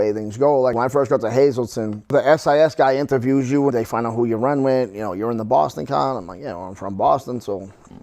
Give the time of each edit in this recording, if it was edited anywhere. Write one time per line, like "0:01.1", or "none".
0:00.7
0:02.1
0:03.7

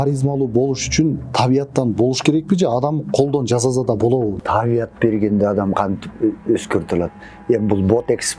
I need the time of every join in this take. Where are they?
0:04.4

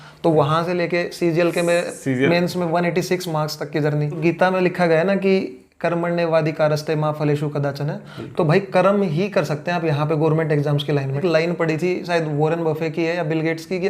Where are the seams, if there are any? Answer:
0:04.2
0:11.2

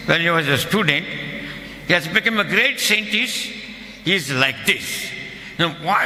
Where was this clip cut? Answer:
none

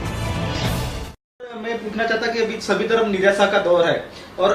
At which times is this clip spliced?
0:01.6

